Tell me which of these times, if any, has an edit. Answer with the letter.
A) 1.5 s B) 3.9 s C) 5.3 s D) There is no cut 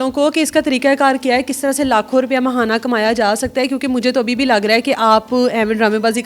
D